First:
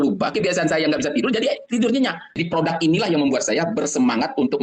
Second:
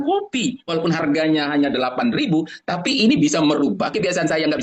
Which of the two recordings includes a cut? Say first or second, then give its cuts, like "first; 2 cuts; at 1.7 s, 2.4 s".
first; 1 cut; at 2.3 s